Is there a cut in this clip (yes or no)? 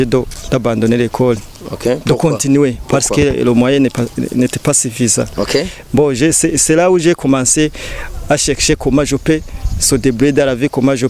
no